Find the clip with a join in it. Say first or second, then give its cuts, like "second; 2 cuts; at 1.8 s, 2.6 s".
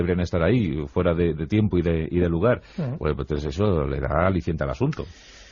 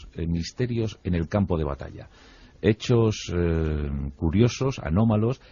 first; 1 cut; at 1.6 s